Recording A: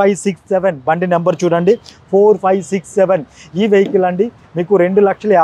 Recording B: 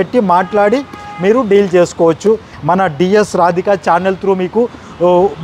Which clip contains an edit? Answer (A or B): B